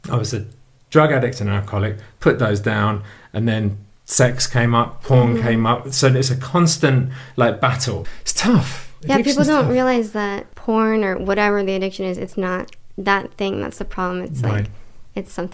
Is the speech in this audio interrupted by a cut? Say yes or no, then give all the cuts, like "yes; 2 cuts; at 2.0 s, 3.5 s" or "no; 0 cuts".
yes; 2 cuts; at 7.9 s, 10.5 s